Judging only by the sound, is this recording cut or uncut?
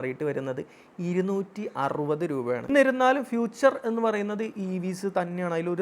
cut